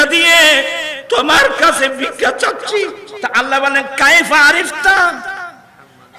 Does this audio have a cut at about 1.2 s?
no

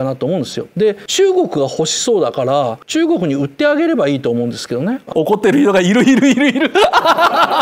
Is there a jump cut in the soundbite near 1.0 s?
no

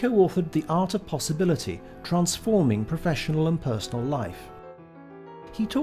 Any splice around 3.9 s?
yes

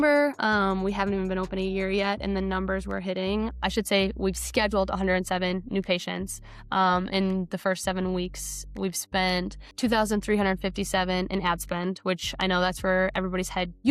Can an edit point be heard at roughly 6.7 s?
no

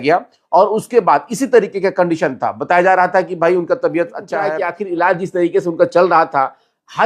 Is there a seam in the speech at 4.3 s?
yes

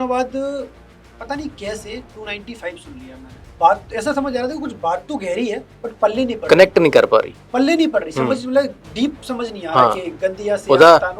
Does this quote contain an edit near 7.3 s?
no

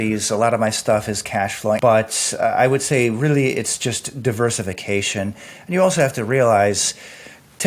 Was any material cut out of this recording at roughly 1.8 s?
yes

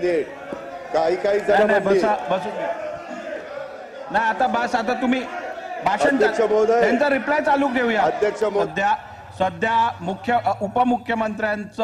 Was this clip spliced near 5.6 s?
no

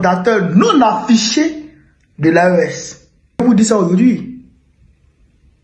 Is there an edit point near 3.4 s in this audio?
yes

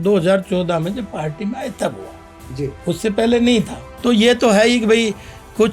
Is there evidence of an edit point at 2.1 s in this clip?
no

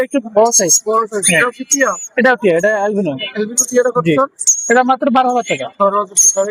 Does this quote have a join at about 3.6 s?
no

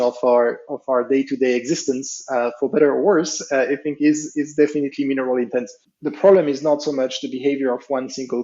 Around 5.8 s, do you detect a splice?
yes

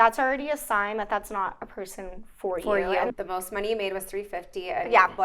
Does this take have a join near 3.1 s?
yes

